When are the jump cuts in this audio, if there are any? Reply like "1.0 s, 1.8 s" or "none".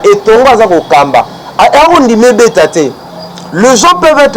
none